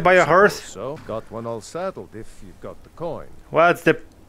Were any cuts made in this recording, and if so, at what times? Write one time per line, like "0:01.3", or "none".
0:01.0
0:03.3